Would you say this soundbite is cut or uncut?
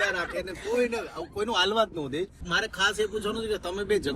cut